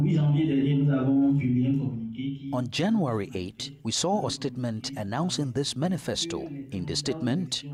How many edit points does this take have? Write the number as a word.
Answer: zero